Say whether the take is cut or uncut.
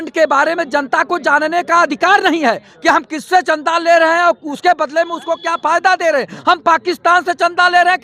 uncut